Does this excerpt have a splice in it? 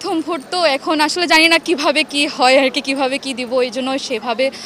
no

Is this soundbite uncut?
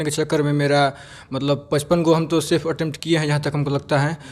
yes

